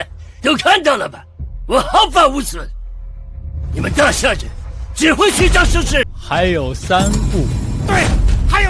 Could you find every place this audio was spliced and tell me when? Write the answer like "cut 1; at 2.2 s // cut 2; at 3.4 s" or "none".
cut 1; at 6.1 s

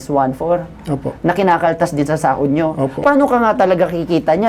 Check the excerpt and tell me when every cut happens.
cut 1; at 3.0 s

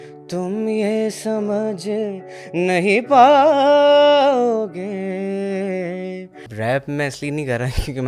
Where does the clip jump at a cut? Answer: cut 1; at 6.4 s

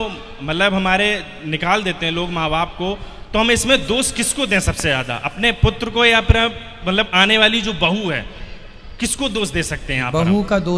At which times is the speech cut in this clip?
none

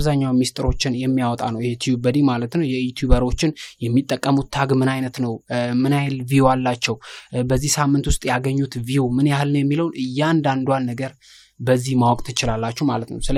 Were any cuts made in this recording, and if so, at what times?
none

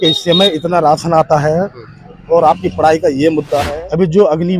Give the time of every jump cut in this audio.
cut 1; at 3.7 s

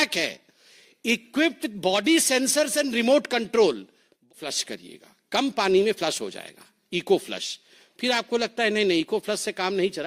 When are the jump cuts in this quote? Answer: cut 1; at 4.3 s

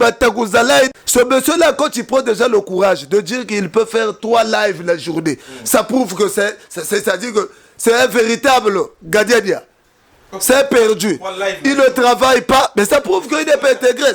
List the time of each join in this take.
cut 1; at 0.9 s

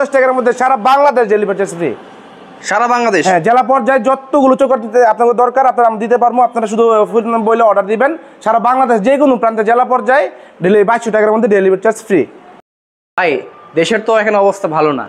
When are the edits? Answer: none

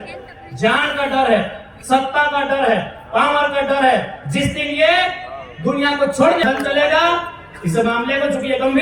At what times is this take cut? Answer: cut 1; at 6.4 s

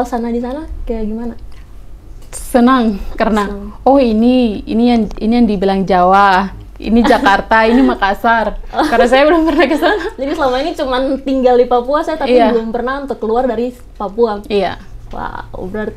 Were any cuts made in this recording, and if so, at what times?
none

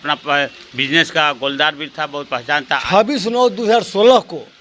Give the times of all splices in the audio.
cut 1; at 2.7 s

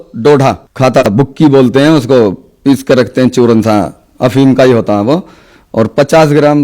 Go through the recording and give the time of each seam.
cut 1; at 1.1 s

